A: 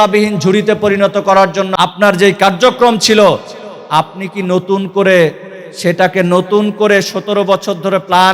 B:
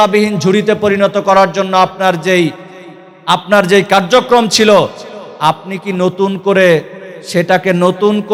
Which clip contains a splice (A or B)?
A